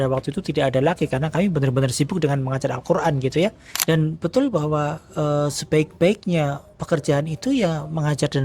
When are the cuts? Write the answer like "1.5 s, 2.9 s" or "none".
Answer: 3.7 s